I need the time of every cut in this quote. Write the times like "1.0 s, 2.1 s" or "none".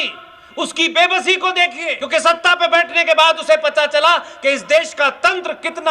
2.0 s